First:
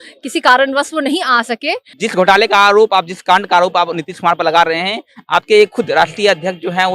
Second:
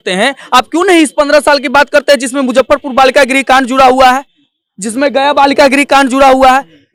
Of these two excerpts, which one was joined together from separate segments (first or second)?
first